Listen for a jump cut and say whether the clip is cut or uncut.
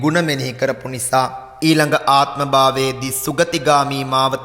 cut